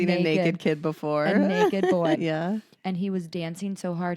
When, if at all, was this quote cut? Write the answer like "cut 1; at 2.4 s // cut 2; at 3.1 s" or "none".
cut 1; at 2.2 s